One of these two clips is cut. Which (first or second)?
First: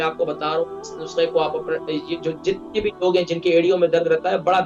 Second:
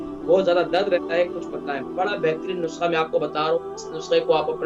second